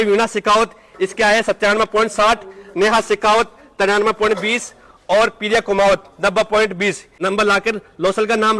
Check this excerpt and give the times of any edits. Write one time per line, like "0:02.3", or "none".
none